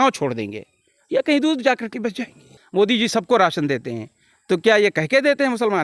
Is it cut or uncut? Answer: cut